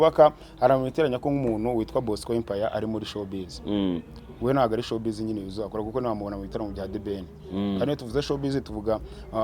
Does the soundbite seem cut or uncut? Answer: uncut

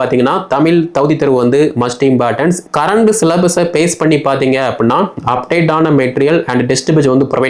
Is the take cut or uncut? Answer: cut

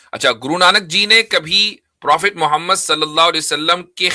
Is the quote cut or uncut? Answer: uncut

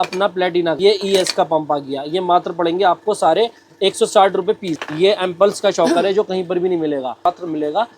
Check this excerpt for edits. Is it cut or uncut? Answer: cut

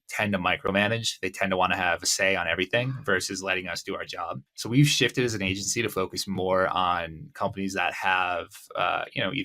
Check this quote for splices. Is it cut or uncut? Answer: cut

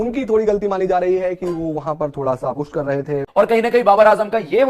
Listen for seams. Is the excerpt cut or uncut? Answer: cut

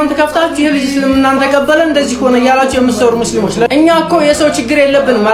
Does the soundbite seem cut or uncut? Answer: uncut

